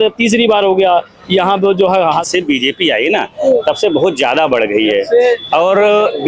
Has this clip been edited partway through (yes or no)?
yes